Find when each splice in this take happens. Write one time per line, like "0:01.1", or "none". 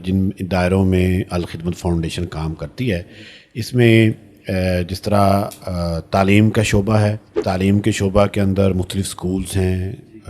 0:07.3